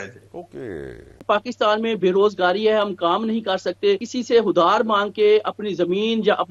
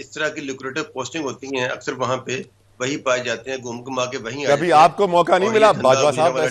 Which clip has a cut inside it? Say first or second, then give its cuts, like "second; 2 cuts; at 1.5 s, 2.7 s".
first; 2 cuts; at 1.2 s, 4.1 s